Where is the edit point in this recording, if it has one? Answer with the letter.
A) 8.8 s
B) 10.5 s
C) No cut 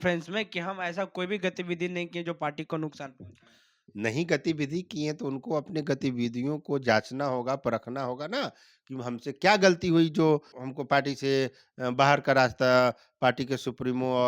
B